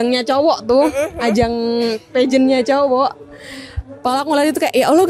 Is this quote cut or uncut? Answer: uncut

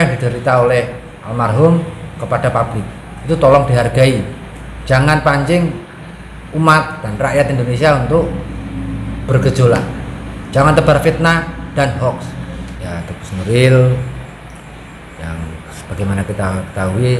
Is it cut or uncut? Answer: cut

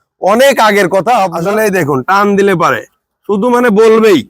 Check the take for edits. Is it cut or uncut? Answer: cut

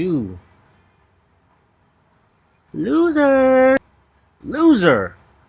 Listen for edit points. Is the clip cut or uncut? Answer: uncut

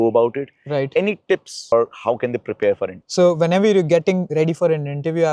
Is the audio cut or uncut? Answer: cut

